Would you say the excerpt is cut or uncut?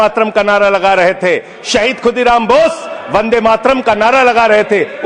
uncut